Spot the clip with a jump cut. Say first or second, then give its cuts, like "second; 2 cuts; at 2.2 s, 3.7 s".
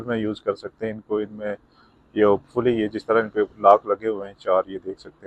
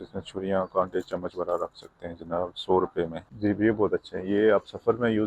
second; 1 cut; at 3.2 s